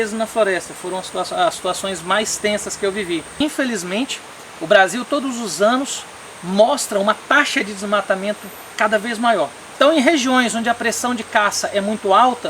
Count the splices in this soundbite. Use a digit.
2